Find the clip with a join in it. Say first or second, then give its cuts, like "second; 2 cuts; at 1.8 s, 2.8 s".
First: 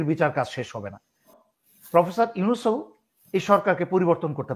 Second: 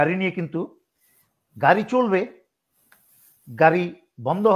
first; 1 cut; at 1.4 s